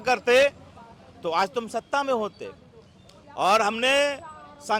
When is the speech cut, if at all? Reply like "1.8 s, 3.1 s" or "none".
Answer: none